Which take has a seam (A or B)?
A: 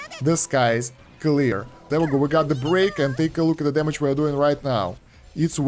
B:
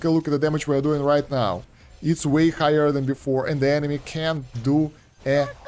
A